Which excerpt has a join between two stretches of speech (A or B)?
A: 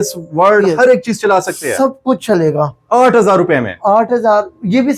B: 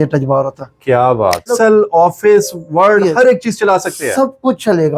B